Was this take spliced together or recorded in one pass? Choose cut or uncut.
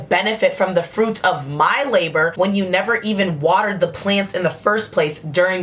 uncut